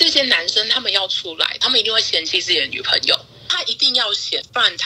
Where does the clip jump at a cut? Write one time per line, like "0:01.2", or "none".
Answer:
0:03.6

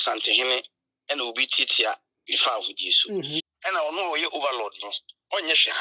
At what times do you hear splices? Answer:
0:03.5

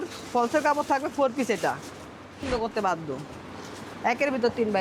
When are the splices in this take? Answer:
0:02.4

